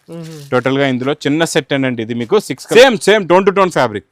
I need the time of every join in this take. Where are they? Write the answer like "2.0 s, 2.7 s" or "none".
2.6 s